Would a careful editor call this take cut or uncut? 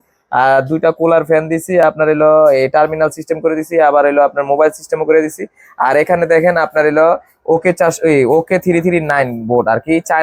uncut